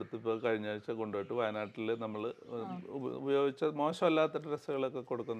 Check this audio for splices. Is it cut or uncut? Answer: uncut